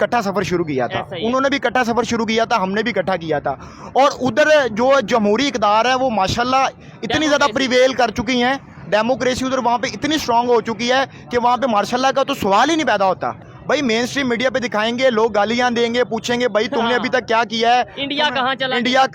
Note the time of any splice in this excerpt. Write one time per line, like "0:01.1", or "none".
0:13.4